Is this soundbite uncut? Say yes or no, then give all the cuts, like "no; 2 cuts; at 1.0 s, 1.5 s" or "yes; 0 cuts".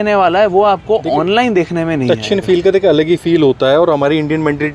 yes; 0 cuts